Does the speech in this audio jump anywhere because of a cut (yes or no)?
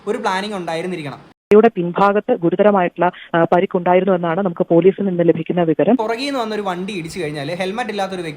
yes